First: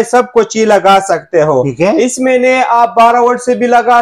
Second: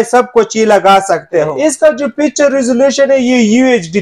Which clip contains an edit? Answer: second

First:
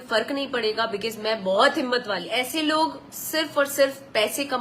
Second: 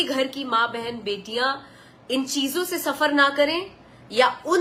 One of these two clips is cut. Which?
first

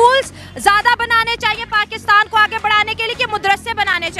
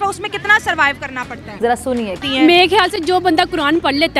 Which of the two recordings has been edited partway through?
second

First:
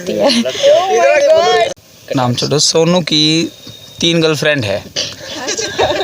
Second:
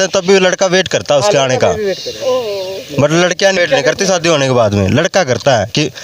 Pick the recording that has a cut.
first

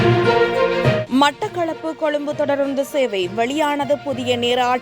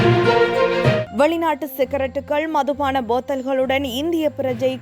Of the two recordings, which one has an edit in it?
first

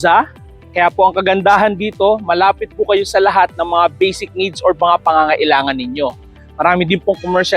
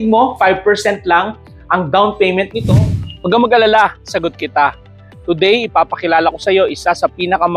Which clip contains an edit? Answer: second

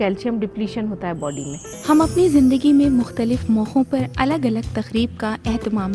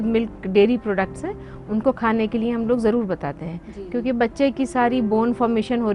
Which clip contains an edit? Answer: first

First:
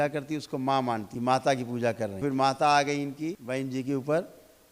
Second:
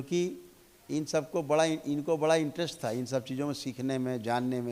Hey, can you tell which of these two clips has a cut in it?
first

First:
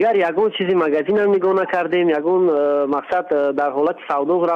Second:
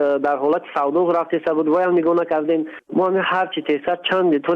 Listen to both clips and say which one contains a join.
second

